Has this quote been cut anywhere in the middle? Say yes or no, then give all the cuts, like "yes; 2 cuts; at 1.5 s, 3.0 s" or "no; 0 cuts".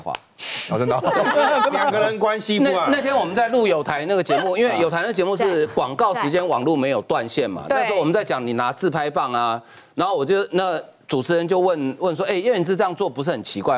no; 0 cuts